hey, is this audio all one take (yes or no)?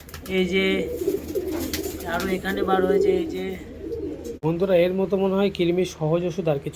no